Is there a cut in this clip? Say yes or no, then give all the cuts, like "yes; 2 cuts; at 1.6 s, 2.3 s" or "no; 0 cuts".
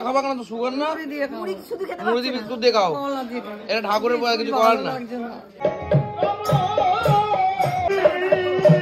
no; 0 cuts